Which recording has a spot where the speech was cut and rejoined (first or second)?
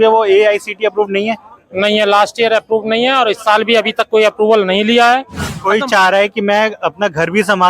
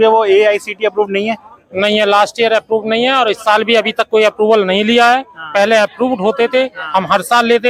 first